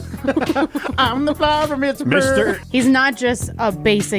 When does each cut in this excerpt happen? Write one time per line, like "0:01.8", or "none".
0:02.6